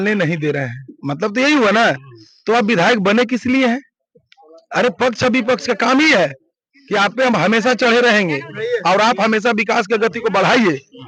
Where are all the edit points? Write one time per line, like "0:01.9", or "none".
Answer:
none

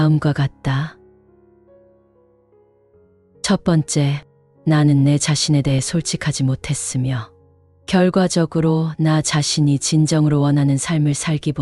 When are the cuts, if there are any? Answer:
0:00.9
0:03.4

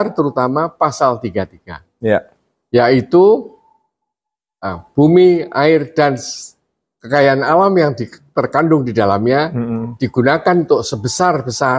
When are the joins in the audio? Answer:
none

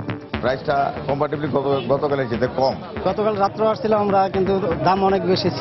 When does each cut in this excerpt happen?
0:02.9

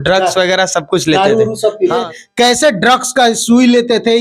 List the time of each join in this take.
0:02.1

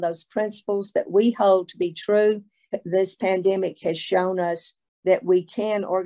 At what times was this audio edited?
0:02.7

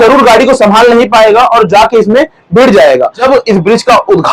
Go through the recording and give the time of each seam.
0:03.2

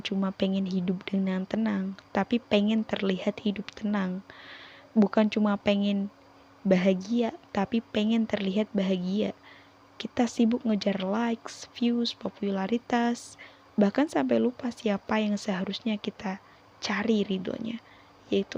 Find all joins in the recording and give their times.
none

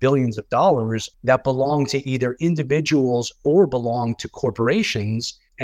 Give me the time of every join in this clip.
0:01.0

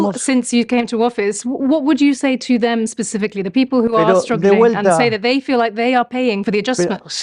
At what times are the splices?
none

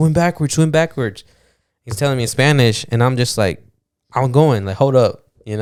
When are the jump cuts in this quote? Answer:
none

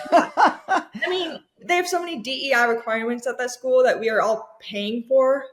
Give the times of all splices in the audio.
0:00.9

